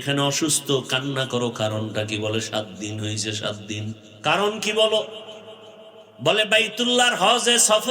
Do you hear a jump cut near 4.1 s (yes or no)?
yes